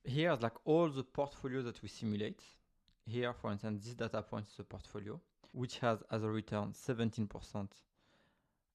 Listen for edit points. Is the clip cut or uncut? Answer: cut